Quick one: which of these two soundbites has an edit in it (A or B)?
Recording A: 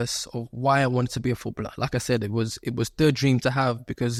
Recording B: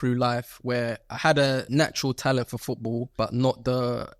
B